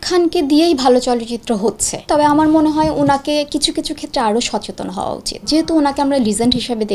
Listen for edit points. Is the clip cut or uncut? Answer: cut